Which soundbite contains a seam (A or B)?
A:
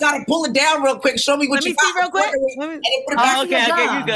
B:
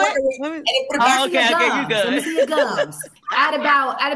B